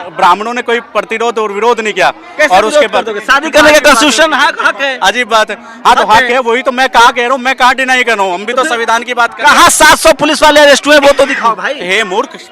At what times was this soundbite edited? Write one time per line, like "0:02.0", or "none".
none